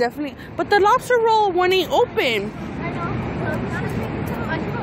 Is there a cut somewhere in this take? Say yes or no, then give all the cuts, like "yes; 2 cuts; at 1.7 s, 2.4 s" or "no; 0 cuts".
no; 0 cuts